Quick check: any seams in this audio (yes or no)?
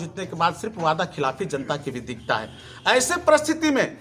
no